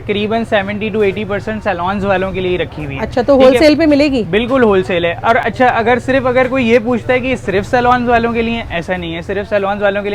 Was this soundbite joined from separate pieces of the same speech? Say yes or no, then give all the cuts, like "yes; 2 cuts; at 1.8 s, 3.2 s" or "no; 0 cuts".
no; 0 cuts